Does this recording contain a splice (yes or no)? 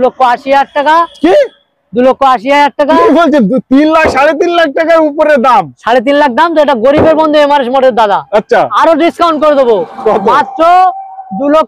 no